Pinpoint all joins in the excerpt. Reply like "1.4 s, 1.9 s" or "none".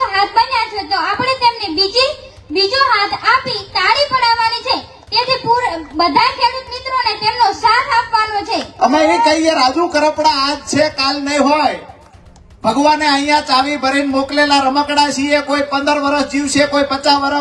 8.7 s